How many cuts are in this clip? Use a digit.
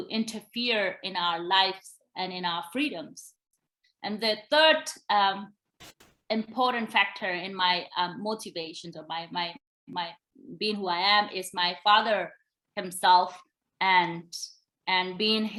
0